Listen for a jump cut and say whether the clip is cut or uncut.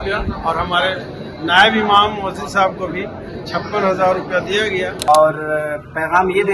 cut